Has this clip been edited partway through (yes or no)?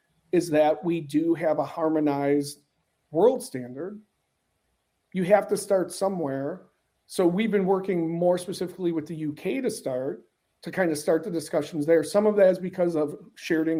no